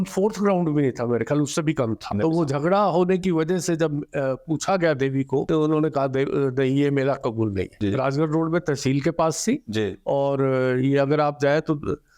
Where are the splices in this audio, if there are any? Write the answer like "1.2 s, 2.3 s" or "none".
2.1 s, 5.5 s, 7.7 s